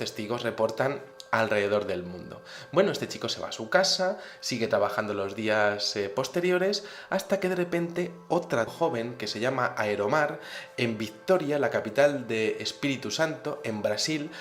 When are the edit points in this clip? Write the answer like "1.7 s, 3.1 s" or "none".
none